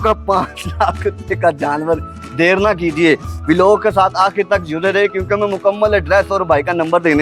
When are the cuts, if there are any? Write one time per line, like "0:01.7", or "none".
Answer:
none